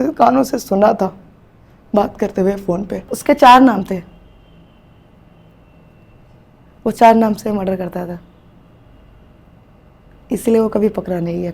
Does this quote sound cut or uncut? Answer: cut